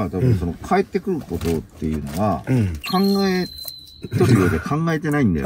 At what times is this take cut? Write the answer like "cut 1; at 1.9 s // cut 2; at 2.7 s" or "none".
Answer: cut 1; at 2.9 s